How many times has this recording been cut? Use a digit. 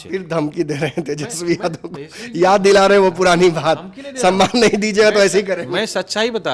0